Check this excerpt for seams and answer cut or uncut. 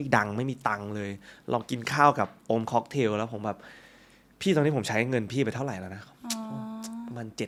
uncut